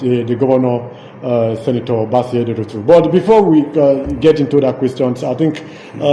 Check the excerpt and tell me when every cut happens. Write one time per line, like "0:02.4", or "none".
none

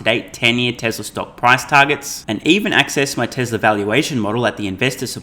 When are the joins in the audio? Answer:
none

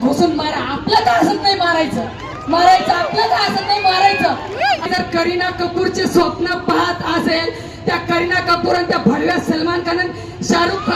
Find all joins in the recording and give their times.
0:04.9

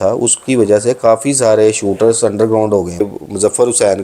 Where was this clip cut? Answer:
0:03.0

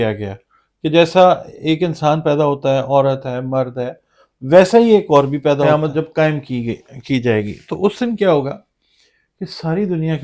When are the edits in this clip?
0:05.7

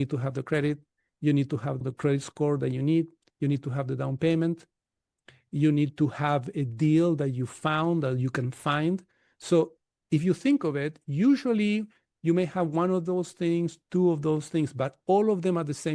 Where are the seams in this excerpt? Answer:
0:01.8

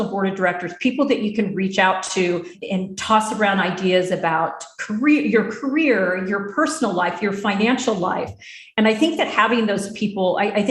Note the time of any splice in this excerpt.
0:02.6

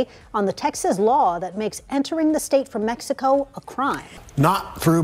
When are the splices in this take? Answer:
0:04.1

